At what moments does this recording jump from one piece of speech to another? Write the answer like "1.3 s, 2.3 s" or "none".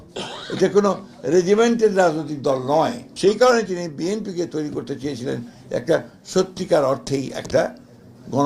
3.0 s